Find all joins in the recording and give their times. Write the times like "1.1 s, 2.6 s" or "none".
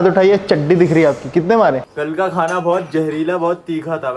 1.9 s